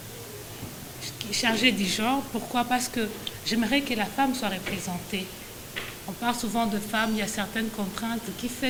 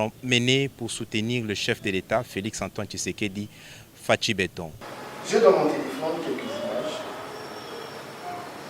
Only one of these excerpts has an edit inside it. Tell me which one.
second; 1 cut; at 4.8 s

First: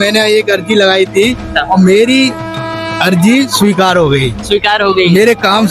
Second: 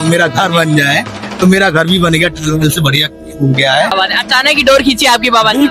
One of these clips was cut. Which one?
second; 1 cut; at 3.9 s

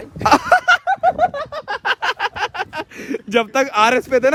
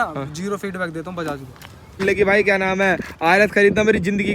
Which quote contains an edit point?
second; 1 cut; at 2.0 s

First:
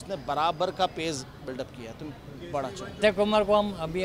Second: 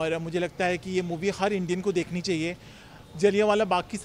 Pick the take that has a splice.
first; 1 cut; at 2.9 s

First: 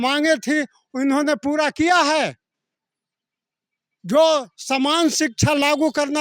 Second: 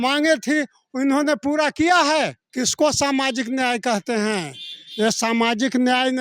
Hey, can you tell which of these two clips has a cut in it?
second; 1 cut; at 2.4 s

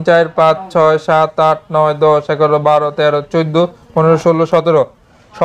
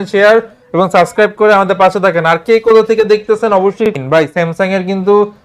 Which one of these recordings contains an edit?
second; 1 cut; at 3.9 s

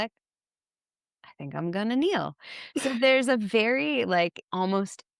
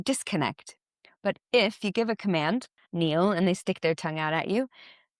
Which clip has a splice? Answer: second; 1 cut; at 2.8 s

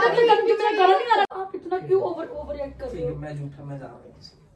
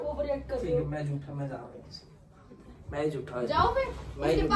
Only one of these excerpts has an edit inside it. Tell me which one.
first; 1 cut; at 1.3 s

